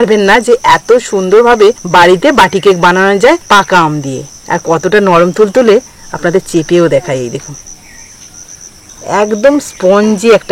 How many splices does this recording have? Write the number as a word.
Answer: four